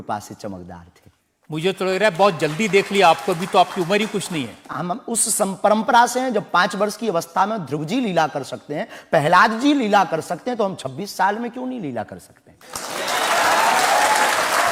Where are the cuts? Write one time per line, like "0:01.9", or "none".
none

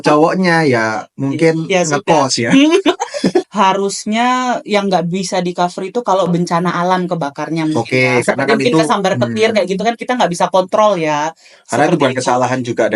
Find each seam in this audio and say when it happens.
0:03.4

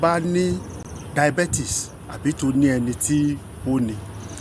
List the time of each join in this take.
0:00.9

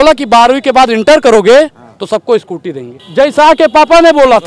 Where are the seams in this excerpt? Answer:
0:02.9

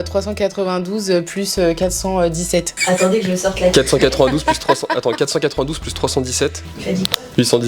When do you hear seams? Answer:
0:02.8

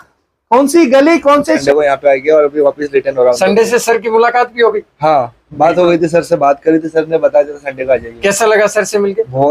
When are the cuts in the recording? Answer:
0:01.6

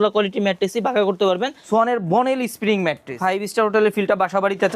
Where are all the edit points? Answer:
0:01.5
0:03.2

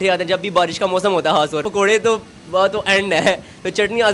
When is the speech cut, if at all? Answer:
0:01.7

